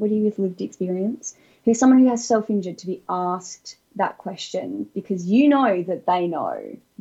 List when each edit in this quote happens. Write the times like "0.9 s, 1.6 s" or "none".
none